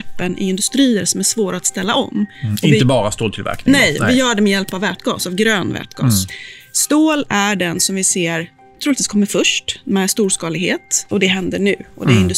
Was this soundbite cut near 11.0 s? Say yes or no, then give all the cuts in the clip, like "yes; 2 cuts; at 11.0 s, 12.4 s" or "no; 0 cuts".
yes; 1 cut; at 11.0 s